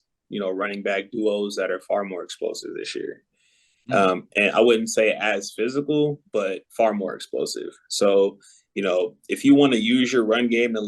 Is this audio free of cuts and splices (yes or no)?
yes